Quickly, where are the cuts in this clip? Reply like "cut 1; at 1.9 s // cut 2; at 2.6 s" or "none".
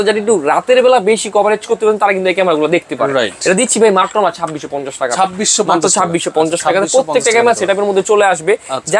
none